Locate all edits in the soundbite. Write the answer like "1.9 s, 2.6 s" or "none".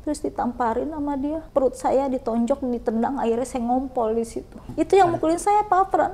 1.4 s, 4.6 s